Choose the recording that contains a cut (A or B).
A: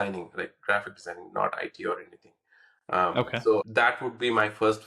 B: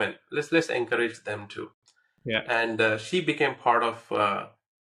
A